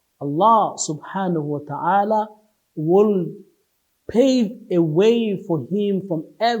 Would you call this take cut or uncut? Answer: uncut